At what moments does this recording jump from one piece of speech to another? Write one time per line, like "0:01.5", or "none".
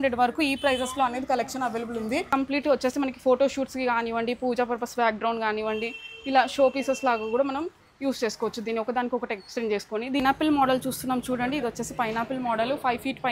0:02.3
0:10.2